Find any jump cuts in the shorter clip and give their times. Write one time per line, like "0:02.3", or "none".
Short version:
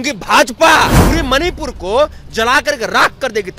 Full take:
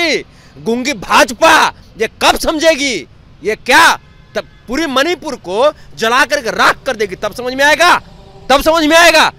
0:01.0